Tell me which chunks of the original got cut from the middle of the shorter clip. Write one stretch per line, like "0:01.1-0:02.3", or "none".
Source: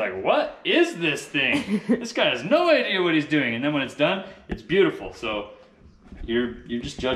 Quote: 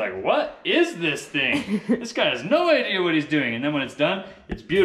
none